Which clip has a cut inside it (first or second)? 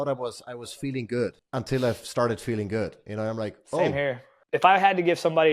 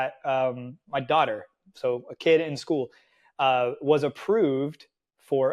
first